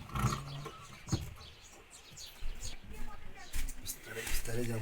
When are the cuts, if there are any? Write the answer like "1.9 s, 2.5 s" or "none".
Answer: 2.5 s